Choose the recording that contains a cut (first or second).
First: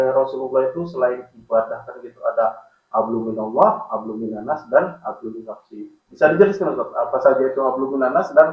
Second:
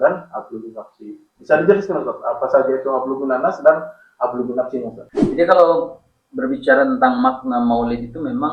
second